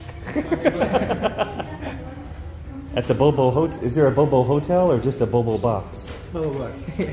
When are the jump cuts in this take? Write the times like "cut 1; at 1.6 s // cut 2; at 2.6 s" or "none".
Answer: none